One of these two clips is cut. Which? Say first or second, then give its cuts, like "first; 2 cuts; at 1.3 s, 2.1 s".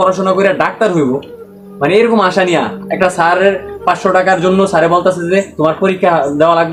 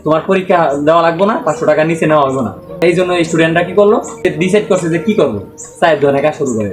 second; 2 cuts; at 2.8 s, 4.2 s